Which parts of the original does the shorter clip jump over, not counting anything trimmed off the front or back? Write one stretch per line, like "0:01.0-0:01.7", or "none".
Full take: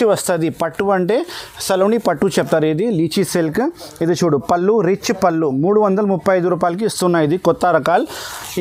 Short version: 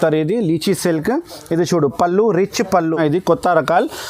0:05.5-0:07.2